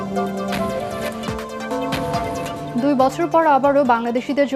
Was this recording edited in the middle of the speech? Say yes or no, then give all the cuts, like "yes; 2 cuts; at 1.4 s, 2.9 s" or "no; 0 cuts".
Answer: yes; 1 cut; at 2.6 s